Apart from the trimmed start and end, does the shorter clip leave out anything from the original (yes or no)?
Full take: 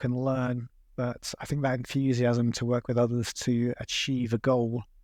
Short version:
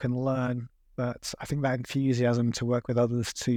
no